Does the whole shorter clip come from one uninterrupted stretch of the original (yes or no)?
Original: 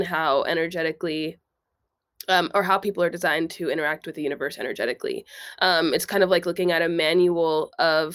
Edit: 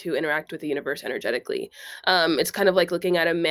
yes